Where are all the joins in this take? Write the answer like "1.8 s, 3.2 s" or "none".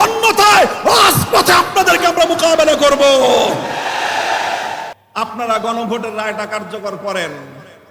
4.9 s